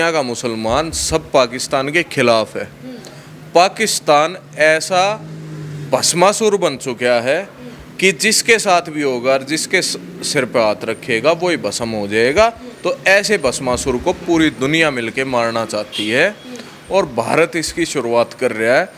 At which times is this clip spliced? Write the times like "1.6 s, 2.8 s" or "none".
none